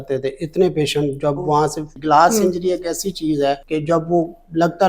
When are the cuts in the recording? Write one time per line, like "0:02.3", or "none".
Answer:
0:01.9
0:03.6